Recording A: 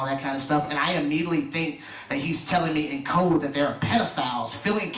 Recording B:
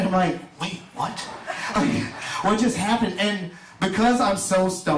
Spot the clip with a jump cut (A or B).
B